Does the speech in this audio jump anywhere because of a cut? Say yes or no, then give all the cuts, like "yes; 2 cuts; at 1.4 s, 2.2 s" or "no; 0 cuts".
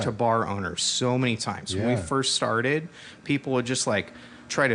no; 0 cuts